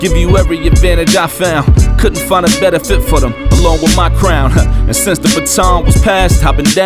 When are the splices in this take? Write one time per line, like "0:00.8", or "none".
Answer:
none

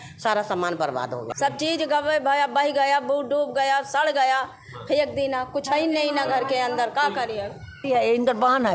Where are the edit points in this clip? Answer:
0:01.2
0:07.8

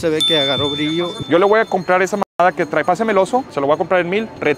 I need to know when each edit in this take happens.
0:01.2

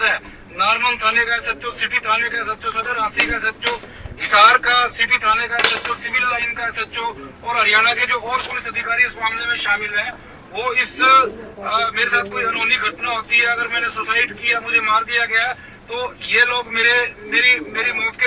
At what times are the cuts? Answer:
none

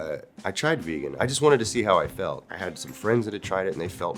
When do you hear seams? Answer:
none

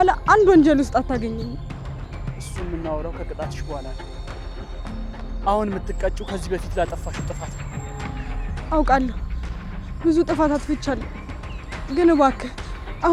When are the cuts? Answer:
none

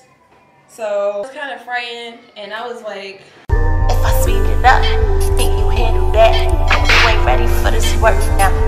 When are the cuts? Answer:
0:01.2
0:03.3

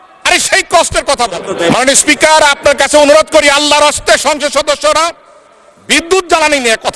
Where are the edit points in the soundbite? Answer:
0:01.5

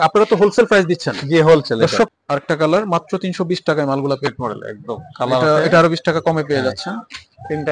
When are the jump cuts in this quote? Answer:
0:02.1
0:04.3

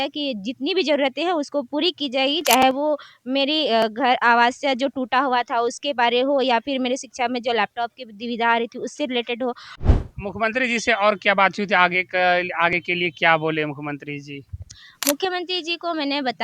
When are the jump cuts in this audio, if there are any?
0:09.8

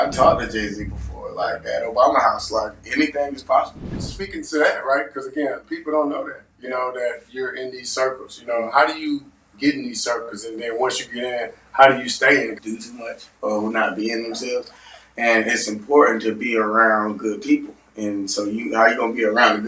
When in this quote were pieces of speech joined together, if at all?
0:04.0
0:12.6

